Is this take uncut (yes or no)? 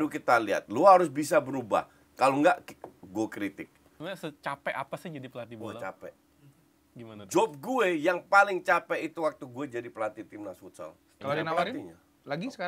no